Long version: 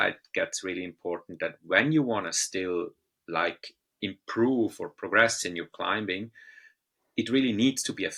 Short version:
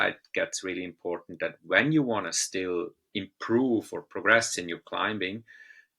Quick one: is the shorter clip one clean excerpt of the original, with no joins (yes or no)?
no